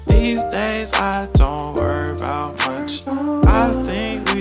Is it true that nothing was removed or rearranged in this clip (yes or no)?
yes